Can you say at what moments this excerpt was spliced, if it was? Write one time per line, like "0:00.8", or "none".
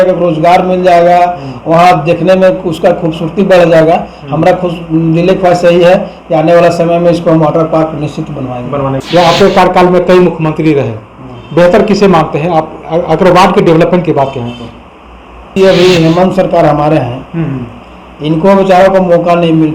0:09.0
0:15.5

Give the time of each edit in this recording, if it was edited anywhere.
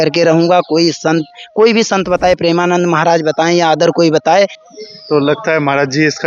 0:04.7

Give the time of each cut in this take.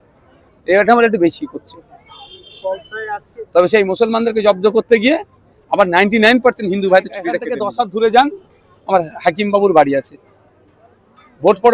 0:07.5

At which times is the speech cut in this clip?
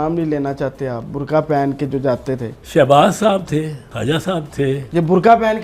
0:02.5
0:03.8
0:04.8

